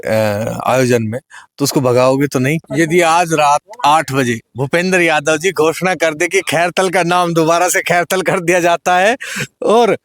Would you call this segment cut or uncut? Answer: cut